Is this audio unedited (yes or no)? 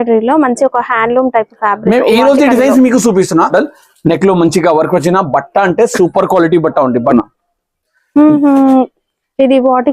no